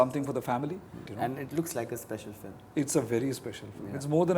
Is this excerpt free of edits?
no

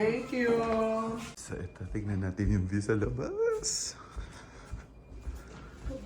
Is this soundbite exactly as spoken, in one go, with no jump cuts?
no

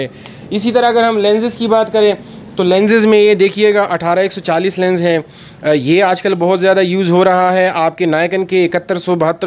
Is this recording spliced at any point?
no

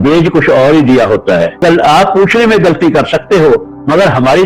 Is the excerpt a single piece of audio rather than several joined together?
no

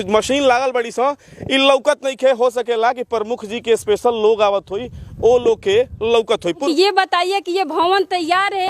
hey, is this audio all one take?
no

